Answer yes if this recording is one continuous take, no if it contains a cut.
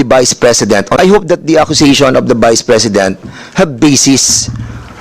no